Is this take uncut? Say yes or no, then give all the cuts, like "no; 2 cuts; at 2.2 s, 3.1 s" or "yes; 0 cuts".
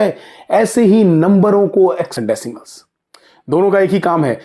no; 1 cut; at 2.1 s